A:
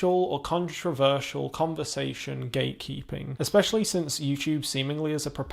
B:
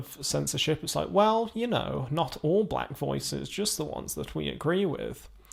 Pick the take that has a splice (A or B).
A